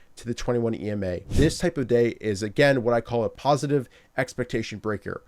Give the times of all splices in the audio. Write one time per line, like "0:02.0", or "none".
0:01.3
0:03.4